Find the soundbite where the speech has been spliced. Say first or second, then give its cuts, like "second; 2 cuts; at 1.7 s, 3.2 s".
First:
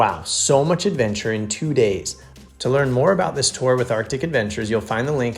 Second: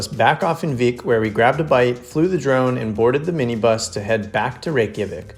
first; 1 cut; at 2.2 s